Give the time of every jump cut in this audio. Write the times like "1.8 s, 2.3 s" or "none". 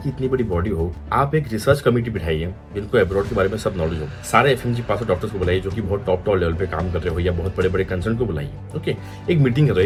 none